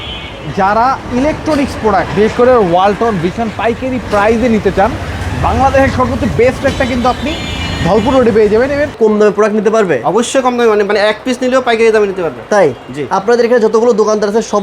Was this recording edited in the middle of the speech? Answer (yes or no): yes